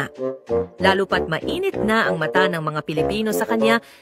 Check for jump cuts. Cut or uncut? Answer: cut